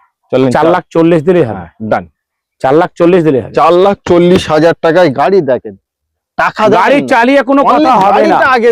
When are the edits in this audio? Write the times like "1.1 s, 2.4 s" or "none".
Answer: none